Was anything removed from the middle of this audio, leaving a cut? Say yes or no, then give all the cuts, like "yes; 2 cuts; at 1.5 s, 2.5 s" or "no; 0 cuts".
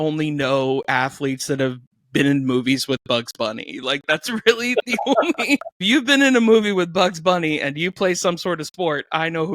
yes; 1 cut; at 5.8 s